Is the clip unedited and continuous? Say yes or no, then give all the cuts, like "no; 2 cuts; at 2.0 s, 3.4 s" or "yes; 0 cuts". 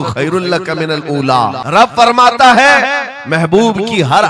no; 1 cut; at 1.6 s